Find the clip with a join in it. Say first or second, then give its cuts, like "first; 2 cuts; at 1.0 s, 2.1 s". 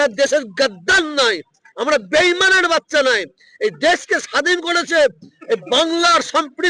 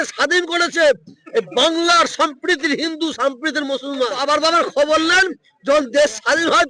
second; 1 cut; at 4.2 s